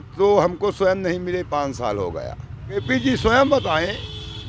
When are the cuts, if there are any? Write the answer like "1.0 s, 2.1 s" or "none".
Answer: 2.8 s